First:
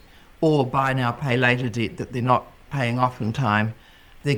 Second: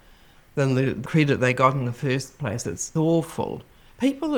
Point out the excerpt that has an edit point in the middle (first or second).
second